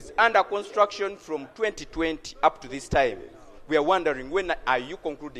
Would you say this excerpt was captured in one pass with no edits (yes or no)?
yes